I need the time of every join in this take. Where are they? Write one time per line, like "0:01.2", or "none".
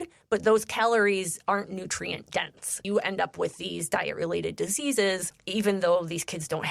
0:02.8
0:05.3